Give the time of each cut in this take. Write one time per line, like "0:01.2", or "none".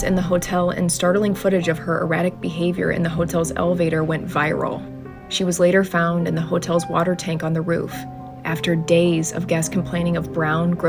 none